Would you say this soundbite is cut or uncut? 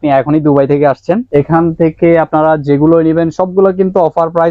cut